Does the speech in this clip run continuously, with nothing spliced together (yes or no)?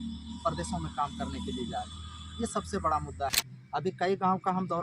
no